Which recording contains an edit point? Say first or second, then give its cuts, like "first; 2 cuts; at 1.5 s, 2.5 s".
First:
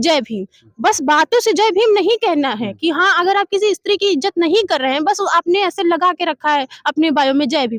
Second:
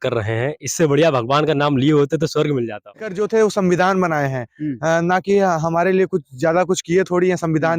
second; 1 cut; at 3.1 s